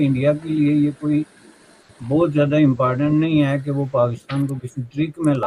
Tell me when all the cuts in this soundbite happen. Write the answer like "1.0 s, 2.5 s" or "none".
none